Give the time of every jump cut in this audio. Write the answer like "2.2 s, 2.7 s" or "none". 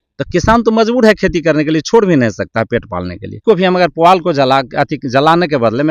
3.4 s